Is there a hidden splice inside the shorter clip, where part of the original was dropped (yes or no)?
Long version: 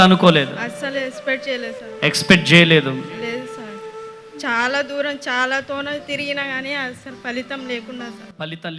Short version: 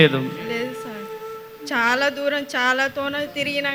no